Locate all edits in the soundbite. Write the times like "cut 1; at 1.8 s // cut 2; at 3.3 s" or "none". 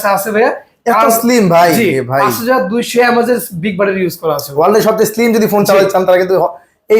none